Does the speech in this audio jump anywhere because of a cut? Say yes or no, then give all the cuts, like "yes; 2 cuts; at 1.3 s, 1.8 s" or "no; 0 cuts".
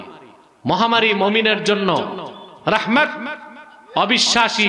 no; 0 cuts